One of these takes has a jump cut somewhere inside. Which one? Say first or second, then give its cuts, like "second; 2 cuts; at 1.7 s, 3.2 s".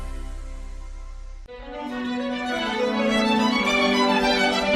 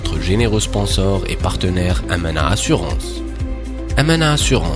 first; 1 cut; at 1.3 s